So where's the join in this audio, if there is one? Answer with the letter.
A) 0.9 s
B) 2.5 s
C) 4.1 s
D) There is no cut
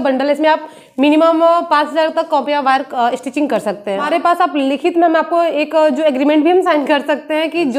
C